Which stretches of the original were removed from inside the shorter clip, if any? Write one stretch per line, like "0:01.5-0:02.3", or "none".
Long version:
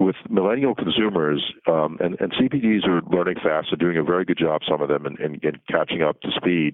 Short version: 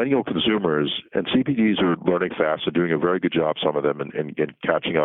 0:01.6-0:02.1